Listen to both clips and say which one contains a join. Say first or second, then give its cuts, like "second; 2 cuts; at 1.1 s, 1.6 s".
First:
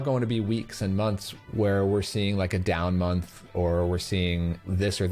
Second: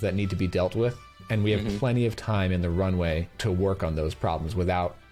first; 1 cut; at 1.3 s